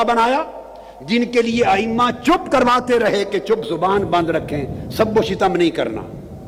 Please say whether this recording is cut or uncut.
uncut